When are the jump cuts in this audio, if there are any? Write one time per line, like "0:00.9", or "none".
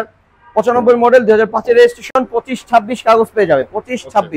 none